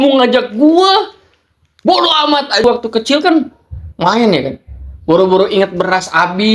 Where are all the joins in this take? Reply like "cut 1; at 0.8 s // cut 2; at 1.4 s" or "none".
cut 1; at 2.6 s